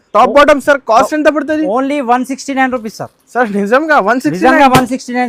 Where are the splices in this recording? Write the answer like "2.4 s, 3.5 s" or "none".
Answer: none